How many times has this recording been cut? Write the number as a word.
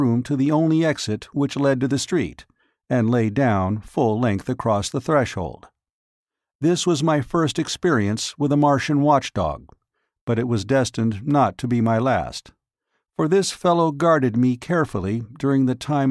one